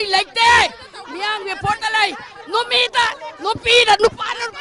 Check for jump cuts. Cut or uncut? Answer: uncut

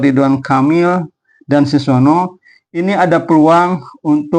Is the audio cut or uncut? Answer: uncut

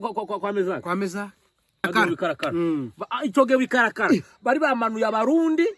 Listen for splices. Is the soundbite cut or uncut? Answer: cut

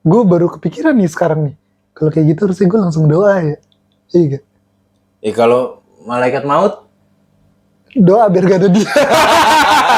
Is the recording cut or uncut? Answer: uncut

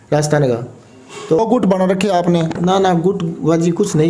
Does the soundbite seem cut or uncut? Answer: cut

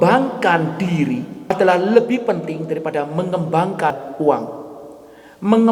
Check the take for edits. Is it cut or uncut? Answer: cut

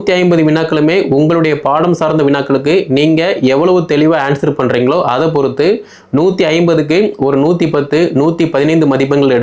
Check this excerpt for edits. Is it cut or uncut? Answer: uncut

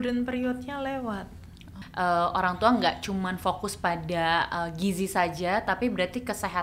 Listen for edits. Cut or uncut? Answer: cut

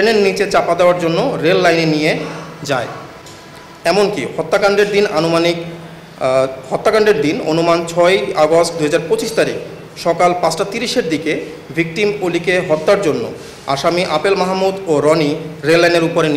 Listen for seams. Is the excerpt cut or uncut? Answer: uncut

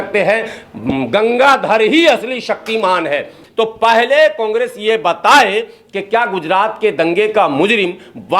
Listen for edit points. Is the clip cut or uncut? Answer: cut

